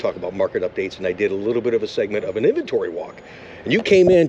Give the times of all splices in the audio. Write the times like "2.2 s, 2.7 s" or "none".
none